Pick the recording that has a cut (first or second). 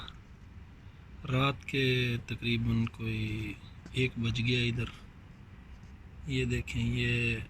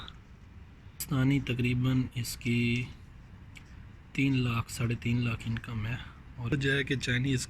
second